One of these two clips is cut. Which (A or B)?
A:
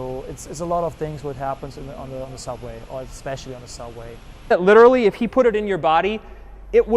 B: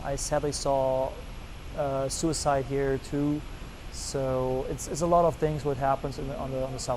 A